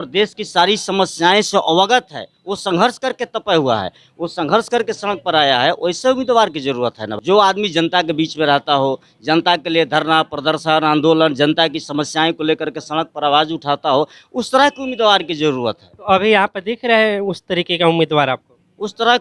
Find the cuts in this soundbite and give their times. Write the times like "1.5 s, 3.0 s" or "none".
none